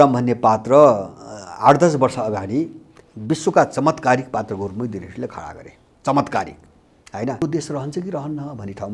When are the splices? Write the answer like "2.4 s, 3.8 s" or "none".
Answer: 7.4 s